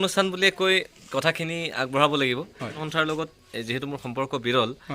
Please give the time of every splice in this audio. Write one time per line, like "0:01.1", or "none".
0:02.8